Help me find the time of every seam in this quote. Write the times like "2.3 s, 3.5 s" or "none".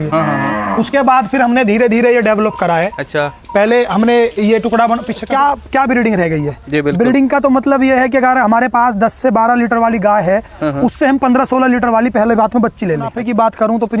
5.2 s, 13.2 s